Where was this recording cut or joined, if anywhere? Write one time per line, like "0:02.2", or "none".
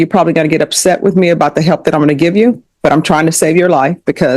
none